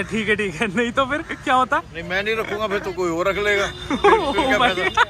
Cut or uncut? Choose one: uncut